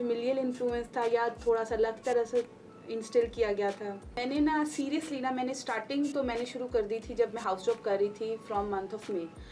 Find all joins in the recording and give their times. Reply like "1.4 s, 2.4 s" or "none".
4.2 s